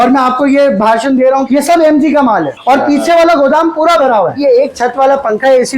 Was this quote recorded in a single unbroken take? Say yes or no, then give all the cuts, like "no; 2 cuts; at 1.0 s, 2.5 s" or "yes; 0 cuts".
no; 3 cuts; at 1.4 s, 2.5 s, 4.4 s